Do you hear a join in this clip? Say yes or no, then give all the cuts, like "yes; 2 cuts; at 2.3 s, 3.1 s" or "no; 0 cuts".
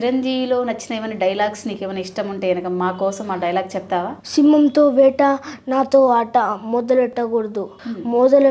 yes; 1 cut; at 4.2 s